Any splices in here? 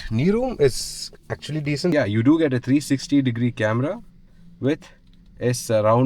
yes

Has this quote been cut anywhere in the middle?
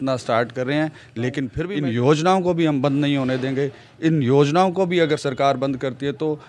yes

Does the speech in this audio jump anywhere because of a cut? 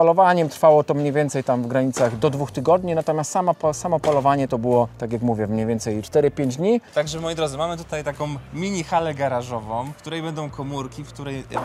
yes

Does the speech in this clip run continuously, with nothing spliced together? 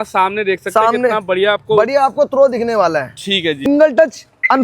no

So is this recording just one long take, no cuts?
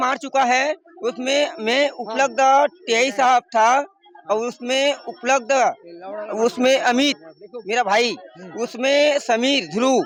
yes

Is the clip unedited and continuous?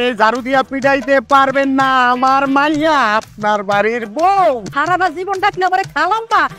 no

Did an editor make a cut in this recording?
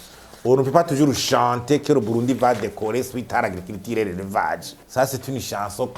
no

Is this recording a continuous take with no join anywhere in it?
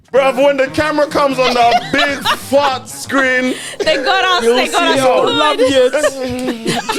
yes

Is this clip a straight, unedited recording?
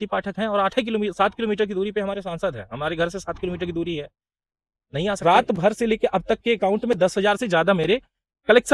no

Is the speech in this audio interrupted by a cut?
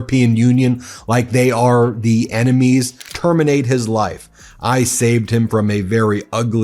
yes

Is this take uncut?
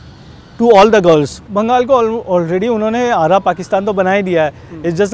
no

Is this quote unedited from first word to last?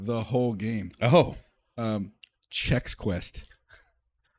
yes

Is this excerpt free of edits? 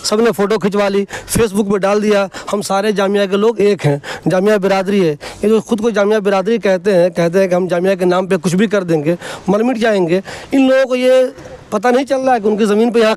yes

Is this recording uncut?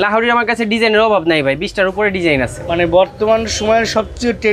yes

